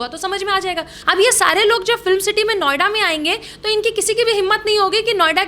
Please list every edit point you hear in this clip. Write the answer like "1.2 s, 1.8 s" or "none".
0.9 s